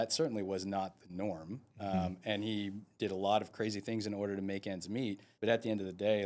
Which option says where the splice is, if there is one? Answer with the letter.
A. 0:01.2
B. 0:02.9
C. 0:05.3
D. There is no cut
C